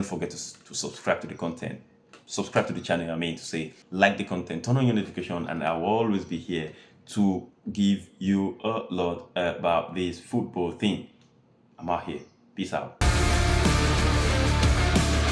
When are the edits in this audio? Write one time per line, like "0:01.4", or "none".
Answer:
0:03.8
0:13.0